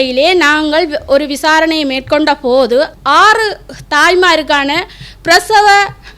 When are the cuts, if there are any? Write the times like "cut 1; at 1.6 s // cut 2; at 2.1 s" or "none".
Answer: cut 1; at 2.9 s